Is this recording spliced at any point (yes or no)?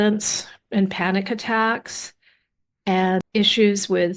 no